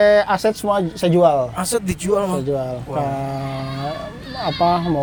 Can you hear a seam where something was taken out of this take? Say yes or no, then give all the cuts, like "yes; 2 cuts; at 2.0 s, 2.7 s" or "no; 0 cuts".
no; 0 cuts